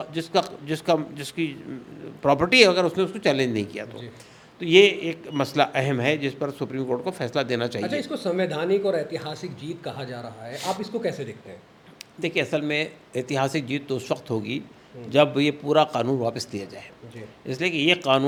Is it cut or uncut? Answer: uncut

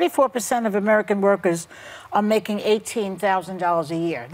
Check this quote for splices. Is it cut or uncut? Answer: uncut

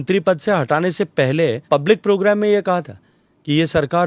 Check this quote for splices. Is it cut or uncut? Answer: cut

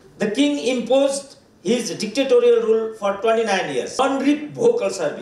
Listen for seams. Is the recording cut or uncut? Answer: cut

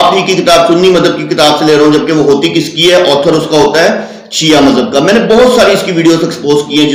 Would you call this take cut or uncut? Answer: uncut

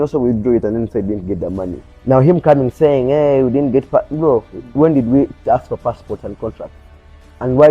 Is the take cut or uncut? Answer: cut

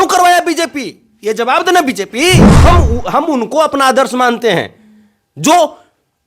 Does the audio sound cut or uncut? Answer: cut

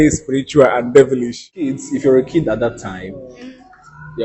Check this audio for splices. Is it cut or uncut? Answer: cut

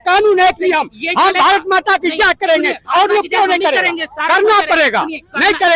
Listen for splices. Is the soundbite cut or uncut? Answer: uncut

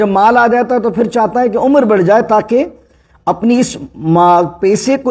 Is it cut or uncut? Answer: uncut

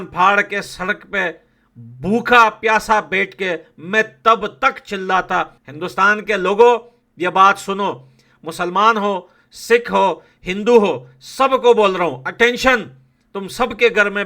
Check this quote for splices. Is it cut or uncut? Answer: cut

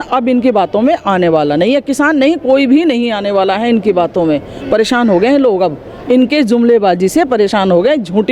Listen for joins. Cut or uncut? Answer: uncut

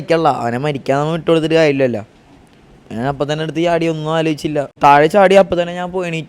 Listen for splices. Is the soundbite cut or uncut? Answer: cut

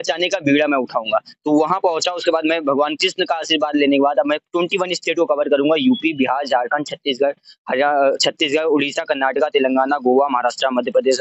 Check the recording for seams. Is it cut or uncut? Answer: uncut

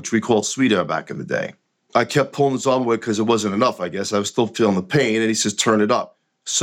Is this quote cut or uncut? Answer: cut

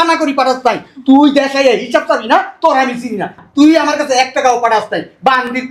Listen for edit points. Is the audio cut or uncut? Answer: uncut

